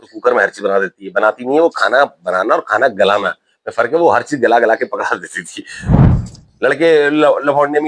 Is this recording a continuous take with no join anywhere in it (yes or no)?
no